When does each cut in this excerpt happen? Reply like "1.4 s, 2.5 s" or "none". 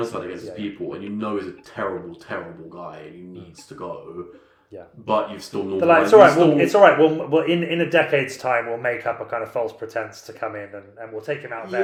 none